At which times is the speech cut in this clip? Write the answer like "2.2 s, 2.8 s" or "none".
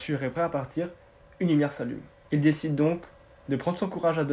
2.1 s